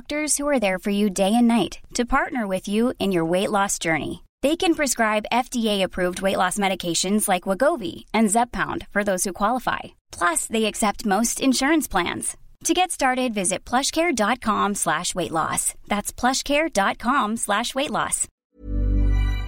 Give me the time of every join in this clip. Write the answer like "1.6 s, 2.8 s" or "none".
18.3 s